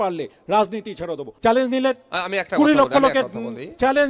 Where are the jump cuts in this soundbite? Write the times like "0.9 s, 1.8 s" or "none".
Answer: 1.2 s